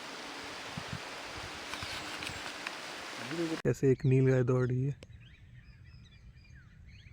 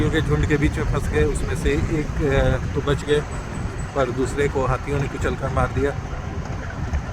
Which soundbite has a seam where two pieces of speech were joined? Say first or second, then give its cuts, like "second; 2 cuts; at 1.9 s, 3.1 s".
first; 1 cut; at 3.5 s